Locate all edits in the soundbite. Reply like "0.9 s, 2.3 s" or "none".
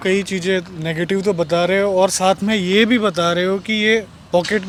none